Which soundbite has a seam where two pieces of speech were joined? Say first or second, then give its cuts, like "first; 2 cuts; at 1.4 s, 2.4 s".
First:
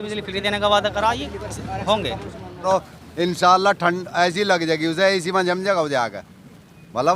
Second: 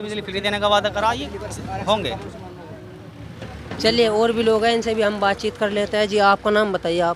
first; 1 cut; at 2.6 s